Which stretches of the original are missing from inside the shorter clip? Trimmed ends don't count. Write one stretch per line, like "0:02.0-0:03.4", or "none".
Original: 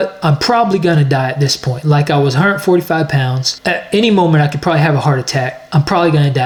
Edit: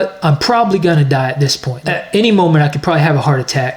0:01.7-0:03.5